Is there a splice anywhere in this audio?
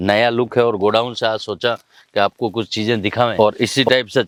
no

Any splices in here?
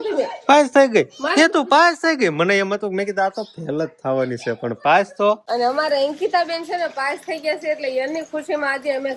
yes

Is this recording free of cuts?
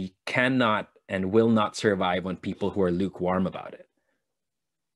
yes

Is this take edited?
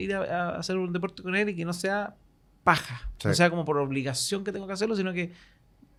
no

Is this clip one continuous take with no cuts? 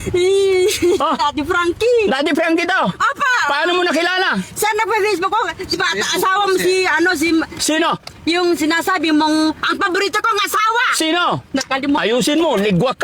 yes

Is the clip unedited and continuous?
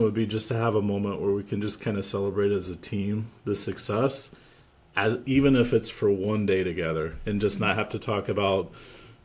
yes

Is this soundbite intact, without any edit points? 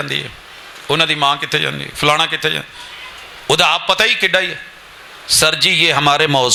yes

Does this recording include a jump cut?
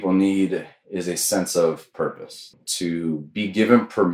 yes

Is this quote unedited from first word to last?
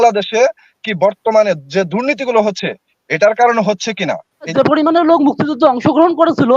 no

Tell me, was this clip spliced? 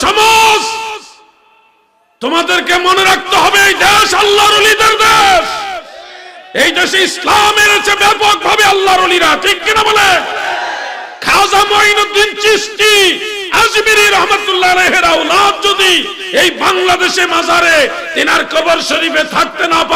no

